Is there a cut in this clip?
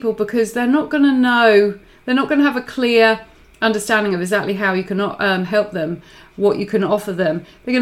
no; 0 cuts

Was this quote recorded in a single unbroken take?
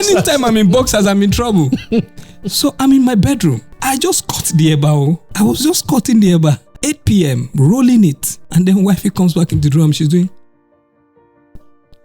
no; 4 cuts; at 3.7 s, 5.3 s, 6.7 s, 8.3 s

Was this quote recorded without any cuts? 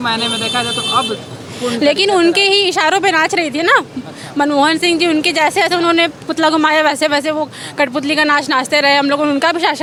yes; 0 cuts

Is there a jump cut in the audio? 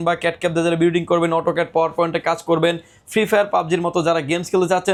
no; 0 cuts

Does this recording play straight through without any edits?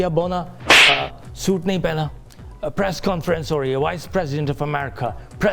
yes; 0 cuts

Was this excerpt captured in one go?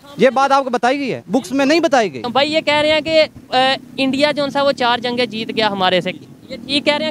no; 1 cut; at 2.2 s

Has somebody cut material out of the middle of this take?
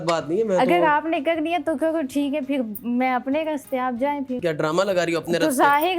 yes; 1 cut; at 4.4 s

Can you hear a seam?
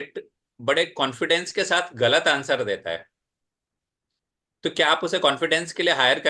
no; 0 cuts

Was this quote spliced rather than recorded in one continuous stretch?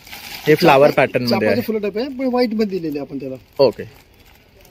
no; 0 cuts

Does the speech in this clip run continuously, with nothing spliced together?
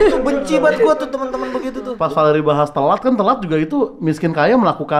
no; 1 cut; at 1.9 s

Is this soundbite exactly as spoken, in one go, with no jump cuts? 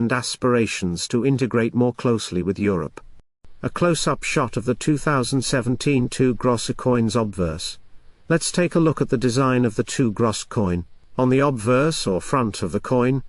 yes; 0 cuts

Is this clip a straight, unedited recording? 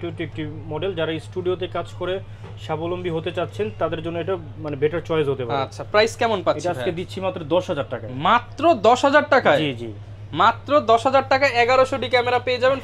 yes; 0 cuts

